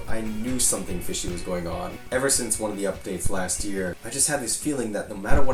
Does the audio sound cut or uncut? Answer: uncut